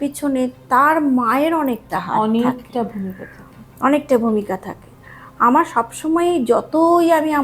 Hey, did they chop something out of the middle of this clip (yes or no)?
no